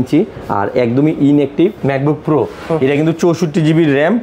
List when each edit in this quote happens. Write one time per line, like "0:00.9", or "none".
0:01.8